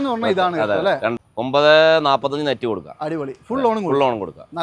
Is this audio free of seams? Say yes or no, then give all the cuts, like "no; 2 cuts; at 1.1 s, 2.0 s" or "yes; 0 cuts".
no; 1 cut; at 1.1 s